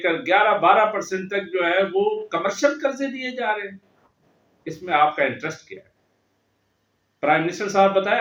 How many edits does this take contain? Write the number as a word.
zero